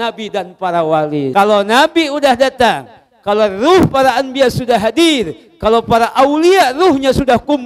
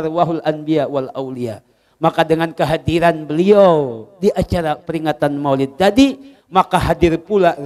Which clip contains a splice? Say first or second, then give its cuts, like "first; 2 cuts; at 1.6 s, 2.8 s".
first; 1 cut; at 1.3 s